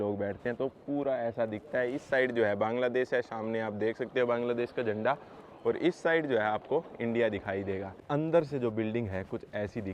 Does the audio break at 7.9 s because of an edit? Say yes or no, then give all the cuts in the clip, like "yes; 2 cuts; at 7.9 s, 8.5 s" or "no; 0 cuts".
yes; 1 cut; at 7.9 s